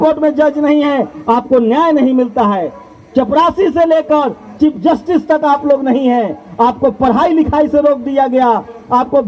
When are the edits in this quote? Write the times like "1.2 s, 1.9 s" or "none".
none